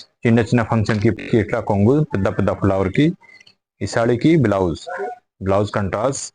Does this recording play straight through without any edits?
no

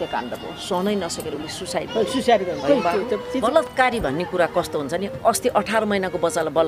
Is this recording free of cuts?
no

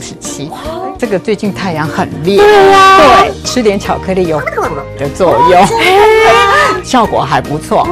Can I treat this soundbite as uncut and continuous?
no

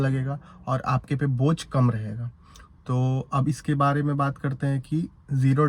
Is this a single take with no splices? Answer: yes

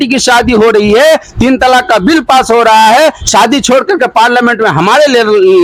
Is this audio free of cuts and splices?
yes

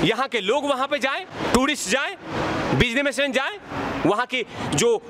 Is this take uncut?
yes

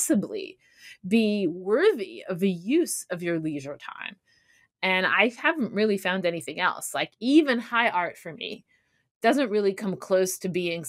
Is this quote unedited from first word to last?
yes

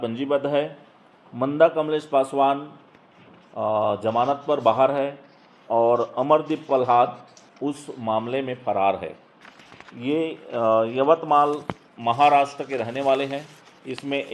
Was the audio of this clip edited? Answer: no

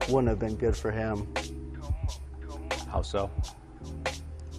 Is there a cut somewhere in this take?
yes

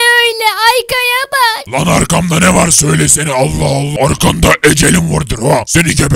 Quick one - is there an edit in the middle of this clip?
no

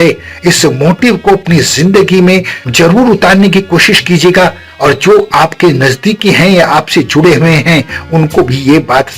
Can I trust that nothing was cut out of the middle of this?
no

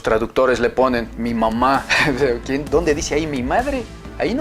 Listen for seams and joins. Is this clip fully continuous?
no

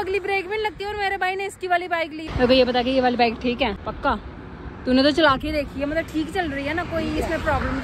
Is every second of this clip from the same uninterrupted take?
no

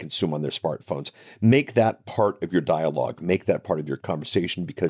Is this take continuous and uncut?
no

